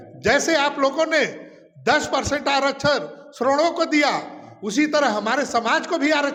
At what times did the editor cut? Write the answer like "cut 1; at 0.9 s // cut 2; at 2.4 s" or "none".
none